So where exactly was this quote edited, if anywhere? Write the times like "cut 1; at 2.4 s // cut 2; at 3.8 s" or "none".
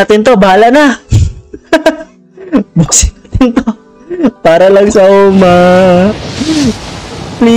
cut 1; at 1.5 s